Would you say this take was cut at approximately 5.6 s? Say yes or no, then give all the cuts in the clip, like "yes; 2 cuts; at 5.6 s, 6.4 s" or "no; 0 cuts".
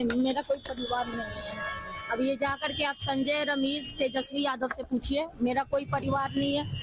no; 1 cut; at 1.3 s